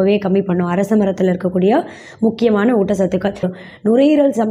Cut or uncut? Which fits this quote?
cut